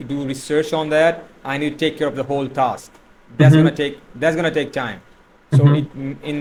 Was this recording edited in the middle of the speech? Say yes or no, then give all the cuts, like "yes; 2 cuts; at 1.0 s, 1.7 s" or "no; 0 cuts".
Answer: no; 0 cuts